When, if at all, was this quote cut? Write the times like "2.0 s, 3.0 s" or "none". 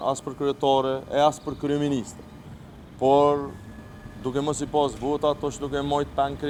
none